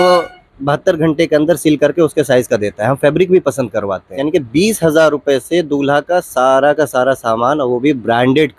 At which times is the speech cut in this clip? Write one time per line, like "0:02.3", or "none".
0:04.2